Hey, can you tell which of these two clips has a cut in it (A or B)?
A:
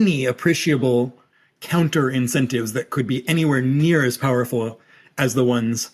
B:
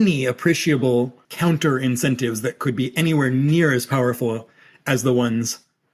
B